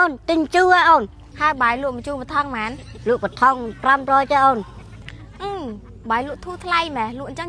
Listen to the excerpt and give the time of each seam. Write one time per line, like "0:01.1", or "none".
0:01.2